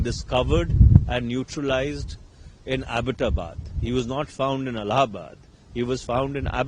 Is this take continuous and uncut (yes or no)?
yes